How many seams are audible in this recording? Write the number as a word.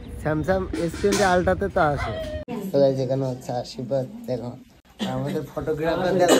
one